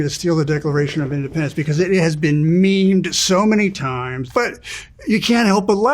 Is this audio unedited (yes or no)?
no